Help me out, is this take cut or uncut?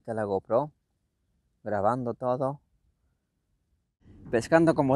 uncut